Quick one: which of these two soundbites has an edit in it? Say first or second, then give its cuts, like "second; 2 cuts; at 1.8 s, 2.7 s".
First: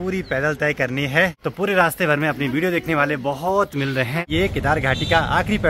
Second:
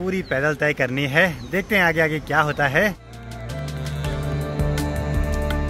first; 2 cuts; at 1.4 s, 4.3 s